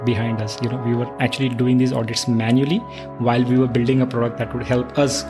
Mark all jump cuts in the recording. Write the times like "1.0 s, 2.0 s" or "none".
none